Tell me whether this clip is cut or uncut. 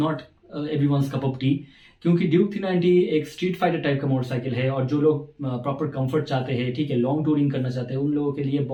uncut